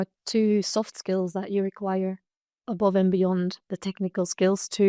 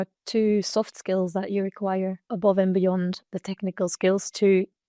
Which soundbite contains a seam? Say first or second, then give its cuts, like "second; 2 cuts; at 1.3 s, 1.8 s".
second; 1 cut; at 2.2 s